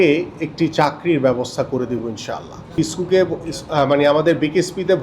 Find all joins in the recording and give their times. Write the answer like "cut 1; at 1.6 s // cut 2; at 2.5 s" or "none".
cut 1; at 2.7 s